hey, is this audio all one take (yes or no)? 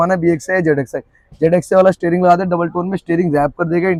yes